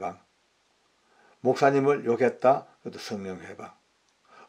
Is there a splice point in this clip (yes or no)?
no